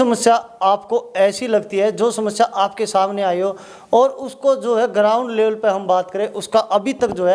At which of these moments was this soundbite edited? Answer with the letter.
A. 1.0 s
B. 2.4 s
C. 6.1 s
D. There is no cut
D